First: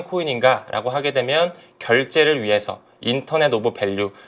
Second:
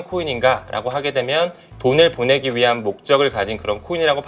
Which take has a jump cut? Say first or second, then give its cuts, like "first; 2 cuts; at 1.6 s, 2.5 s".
second; 1 cut; at 1.6 s